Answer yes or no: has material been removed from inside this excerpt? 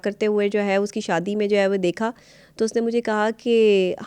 no